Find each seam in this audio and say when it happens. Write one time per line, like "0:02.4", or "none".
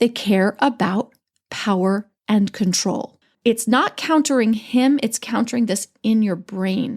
0:02.1
0:03.3